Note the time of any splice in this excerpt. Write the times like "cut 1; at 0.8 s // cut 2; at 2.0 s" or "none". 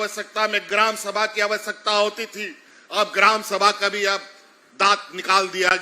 none

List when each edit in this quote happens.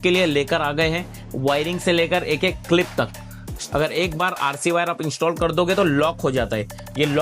cut 1; at 3.5 s

